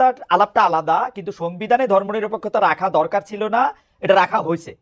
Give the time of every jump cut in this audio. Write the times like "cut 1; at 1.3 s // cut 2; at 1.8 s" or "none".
none